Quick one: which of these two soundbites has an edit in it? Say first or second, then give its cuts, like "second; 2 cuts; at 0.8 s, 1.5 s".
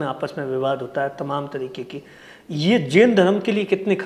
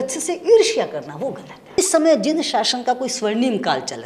second; 1 cut; at 1.5 s